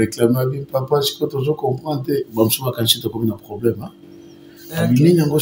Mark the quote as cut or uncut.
uncut